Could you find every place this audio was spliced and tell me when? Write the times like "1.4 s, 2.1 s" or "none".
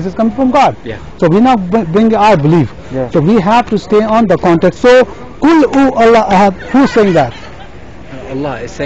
none